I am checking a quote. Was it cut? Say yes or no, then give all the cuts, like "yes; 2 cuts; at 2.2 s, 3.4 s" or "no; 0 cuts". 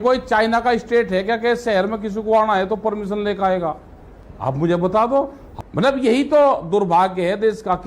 yes; 1 cut; at 5.4 s